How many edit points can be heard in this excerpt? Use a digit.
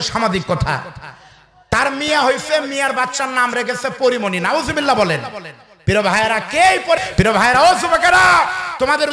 1